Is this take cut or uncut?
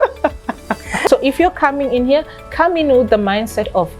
cut